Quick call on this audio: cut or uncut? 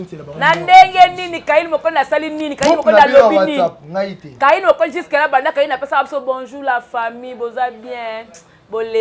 uncut